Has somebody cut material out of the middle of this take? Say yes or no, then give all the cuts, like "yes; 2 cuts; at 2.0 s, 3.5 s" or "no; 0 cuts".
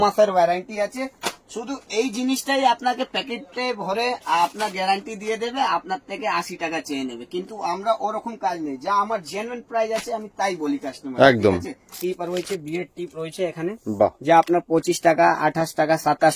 yes; 1 cut; at 11.9 s